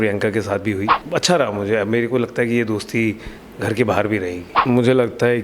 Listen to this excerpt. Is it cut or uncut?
cut